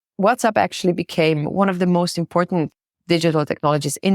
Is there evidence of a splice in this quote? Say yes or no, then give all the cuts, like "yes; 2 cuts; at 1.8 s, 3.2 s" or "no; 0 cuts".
yes; 1 cut; at 2.8 s